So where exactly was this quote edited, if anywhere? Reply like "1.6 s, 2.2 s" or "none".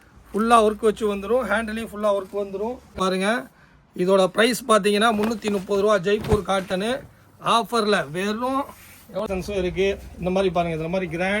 3.0 s, 9.2 s